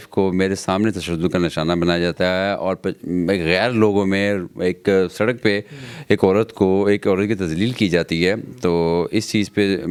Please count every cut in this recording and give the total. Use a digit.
0